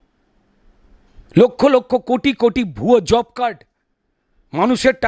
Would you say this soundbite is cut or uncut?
uncut